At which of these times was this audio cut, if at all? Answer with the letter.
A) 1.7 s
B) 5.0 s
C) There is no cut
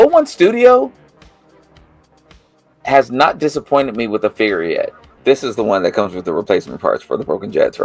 B